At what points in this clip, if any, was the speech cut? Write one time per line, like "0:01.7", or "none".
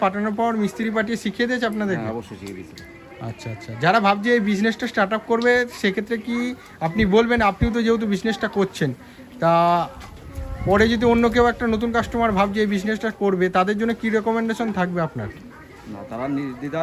none